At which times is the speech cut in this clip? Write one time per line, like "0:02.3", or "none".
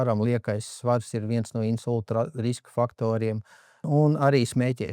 0:03.9